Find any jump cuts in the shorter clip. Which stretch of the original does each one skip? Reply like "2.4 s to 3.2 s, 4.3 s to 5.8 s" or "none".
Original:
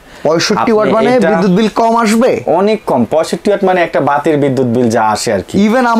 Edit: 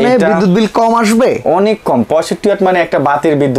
none